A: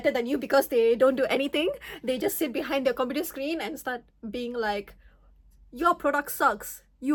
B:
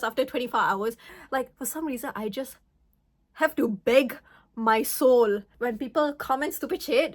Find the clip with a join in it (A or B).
B